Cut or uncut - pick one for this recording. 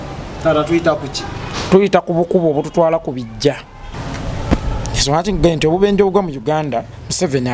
cut